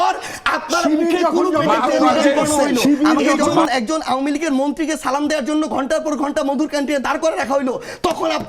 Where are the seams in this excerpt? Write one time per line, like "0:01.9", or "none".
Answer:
0:03.6